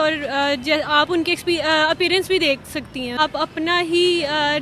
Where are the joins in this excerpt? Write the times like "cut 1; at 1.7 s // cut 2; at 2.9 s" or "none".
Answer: cut 1; at 3.2 s